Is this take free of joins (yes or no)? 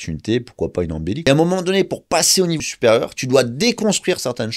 no